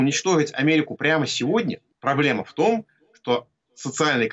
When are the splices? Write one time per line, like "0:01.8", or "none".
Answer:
0:01.9